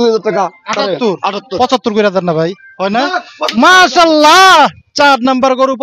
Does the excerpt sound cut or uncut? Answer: uncut